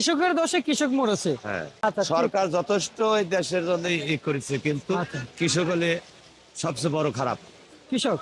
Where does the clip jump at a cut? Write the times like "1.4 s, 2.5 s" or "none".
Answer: 1.8 s